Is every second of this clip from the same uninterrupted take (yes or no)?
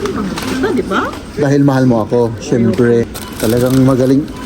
no